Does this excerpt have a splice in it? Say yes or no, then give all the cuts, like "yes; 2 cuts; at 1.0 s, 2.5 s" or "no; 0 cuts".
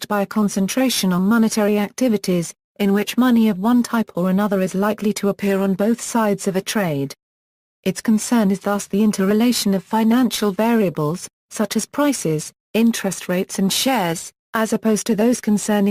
no; 0 cuts